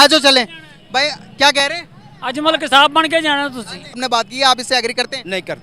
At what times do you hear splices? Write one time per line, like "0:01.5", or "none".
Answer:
0:04.0